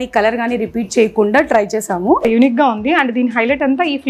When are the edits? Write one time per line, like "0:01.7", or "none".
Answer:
0:02.3